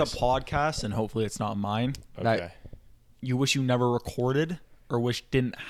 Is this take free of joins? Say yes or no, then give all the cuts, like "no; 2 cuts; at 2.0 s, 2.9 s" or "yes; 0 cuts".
yes; 0 cuts